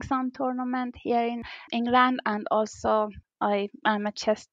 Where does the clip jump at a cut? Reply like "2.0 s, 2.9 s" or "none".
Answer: 1.7 s, 3.2 s